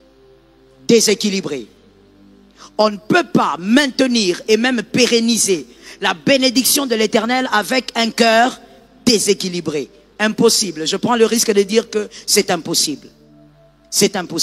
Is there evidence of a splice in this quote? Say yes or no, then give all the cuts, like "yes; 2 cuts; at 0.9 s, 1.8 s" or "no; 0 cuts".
no; 0 cuts